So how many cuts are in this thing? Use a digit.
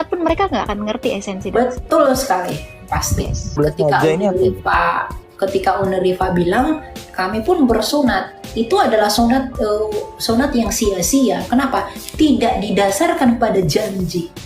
1